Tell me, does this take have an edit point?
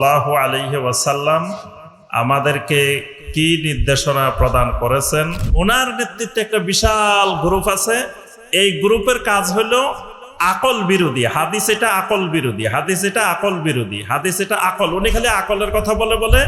yes; 1 cut; at 5.4 s

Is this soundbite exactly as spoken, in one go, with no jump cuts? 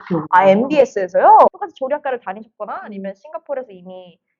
no; 1 cut; at 1.5 s

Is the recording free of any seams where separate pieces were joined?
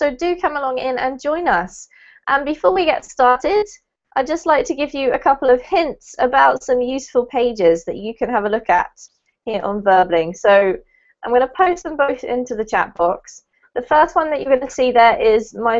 no; 1 cut; at 14.1 s

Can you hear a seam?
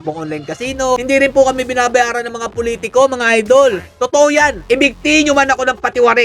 yes; 1 cut; at 1.0 s

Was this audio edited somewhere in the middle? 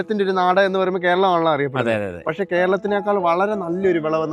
no; 0 cuts

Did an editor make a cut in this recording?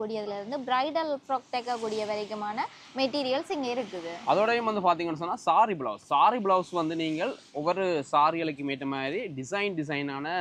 no; 0 cuts

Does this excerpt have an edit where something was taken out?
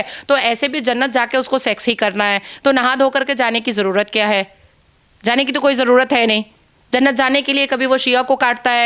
no; 0 cuts

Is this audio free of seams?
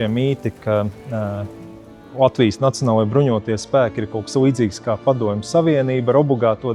yes; 0 cuts

